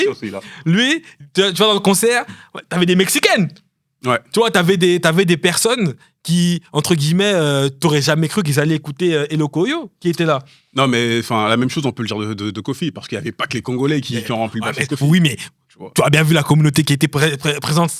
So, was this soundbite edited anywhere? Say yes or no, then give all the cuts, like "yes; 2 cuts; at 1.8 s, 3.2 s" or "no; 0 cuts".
no; 0 cuts